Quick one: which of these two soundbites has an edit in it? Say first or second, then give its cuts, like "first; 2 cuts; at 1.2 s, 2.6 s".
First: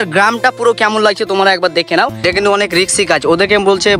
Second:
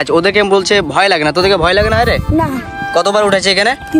first; 1 cut; at 2.2 s